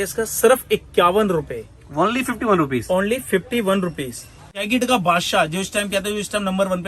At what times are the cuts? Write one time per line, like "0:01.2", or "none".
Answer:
0:04.7